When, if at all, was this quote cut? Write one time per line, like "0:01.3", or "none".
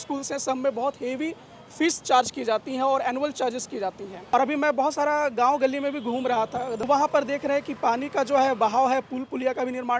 0:04.3
0:06.8